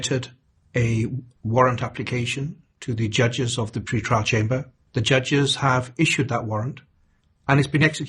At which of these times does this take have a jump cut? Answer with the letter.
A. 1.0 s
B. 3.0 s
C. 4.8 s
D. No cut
C